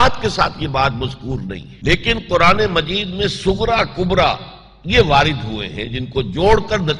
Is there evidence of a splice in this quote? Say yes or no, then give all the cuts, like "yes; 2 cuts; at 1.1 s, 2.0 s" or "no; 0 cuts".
no; 0 cuts